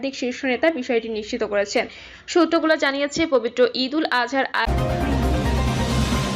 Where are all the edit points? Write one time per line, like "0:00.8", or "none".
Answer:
0:04.7